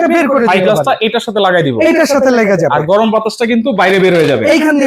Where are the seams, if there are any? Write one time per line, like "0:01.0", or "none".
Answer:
none